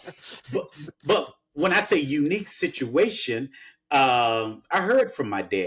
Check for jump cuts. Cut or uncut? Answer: uncut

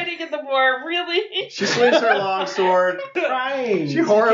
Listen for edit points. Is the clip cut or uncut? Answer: cut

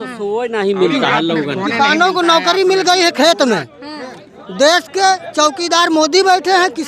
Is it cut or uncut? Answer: uncut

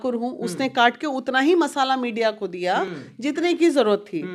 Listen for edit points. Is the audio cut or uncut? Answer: uncut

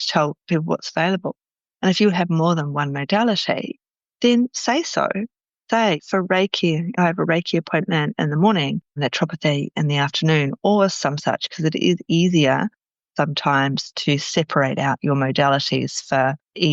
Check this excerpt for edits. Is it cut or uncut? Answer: cut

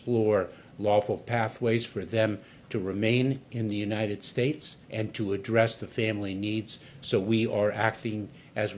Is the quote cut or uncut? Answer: uncut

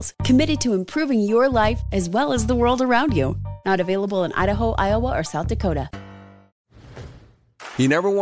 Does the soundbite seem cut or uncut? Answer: cut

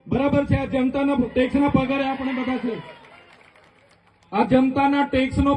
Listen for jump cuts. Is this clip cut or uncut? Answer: uncut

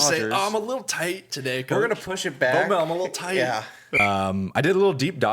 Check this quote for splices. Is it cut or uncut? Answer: cut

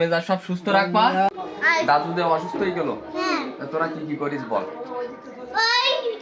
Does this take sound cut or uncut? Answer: cut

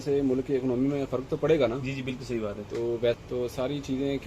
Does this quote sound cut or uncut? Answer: cut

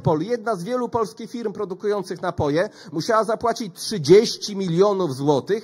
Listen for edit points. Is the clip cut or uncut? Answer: uncut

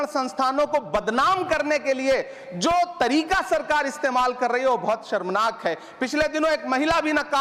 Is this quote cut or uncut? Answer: uncut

